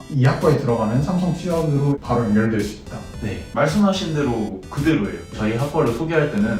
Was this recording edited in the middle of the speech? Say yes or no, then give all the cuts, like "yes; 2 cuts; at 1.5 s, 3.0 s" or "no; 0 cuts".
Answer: yes; 2 cuts; at 3.4 s, 5.3 s